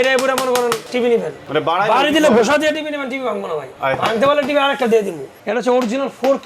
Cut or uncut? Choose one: cut